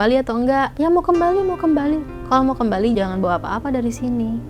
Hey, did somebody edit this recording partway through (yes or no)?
yes